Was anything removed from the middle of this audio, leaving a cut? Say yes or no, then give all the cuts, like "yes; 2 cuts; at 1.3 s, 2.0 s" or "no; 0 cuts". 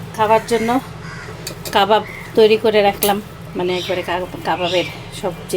no; 0 cuts